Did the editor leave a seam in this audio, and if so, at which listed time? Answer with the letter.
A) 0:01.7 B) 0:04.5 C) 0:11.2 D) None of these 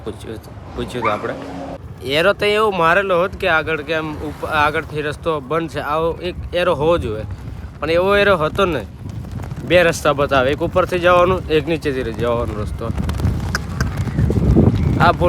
A